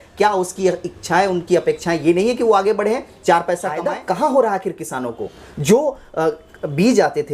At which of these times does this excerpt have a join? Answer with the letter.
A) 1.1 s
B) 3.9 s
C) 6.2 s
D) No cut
B